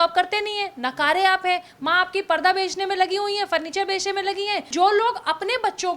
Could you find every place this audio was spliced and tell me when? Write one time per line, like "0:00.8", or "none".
0:04.7